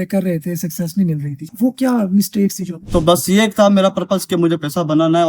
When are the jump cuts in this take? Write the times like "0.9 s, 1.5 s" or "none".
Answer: 1.4 s, 2.9 s